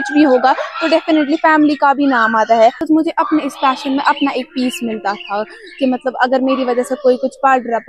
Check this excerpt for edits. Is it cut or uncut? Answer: cut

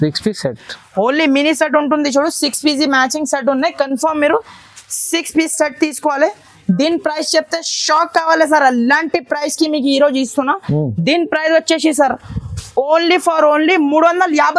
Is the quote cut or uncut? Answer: uncut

